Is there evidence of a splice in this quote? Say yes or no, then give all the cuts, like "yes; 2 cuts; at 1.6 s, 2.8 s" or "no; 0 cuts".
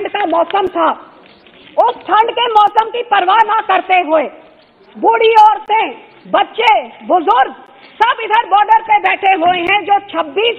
no; 0 cuts